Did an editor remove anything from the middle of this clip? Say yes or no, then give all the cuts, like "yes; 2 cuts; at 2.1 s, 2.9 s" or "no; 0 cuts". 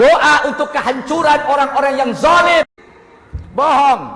yes; 1 cut; at 2.8 s